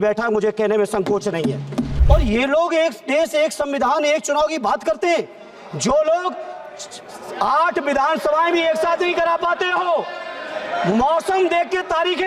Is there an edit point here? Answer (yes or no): yes